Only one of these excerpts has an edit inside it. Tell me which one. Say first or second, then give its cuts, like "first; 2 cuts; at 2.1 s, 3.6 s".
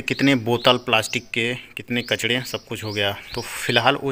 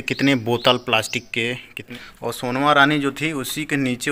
second; 1 cut; at 1.9 s